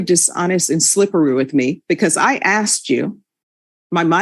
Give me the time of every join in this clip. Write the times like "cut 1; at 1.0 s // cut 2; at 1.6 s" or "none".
none